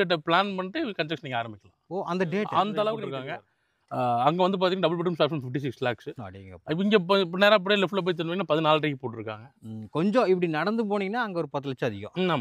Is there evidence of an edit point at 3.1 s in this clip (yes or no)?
yes